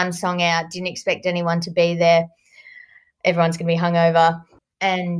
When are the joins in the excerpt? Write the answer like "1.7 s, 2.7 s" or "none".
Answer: none